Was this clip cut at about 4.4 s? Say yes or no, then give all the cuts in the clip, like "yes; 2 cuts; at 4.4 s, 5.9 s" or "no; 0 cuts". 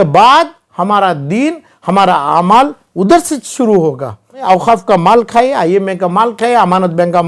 yes; 1 cut; at 4.4 s